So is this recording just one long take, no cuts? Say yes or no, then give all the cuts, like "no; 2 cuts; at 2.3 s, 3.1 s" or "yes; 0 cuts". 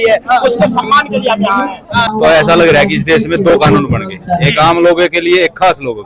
no; 1 cut; at 2.1 s